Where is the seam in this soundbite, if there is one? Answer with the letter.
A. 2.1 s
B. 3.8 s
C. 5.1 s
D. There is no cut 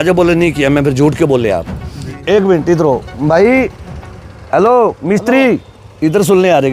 A